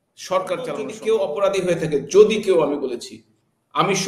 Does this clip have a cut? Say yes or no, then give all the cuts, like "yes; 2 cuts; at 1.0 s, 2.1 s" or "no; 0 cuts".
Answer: yes; 1 cut; at 0.9 s